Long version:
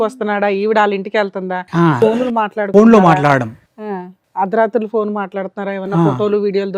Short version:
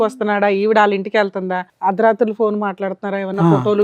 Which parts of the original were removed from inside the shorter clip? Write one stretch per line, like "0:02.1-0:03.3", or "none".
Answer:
0:01.6-0:04.1